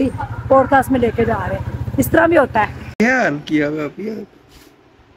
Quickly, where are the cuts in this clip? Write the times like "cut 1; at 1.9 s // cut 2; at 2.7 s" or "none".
cut 1; at 2.8 s